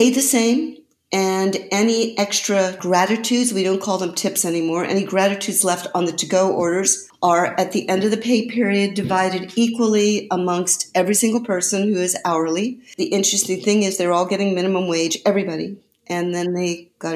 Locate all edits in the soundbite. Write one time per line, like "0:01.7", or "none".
0:02.8
0:07.0
0:12.9